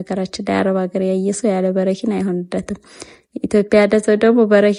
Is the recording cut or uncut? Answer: uncut